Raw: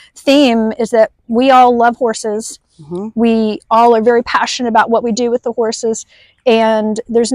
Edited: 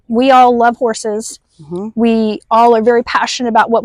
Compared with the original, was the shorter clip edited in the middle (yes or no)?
no